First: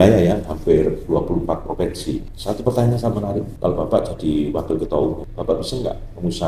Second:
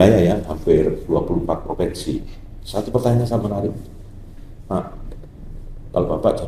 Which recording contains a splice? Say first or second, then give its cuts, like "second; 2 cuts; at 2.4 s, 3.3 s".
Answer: first; 3 cuts; at 2.3 s, 3.5 s, 5.3 s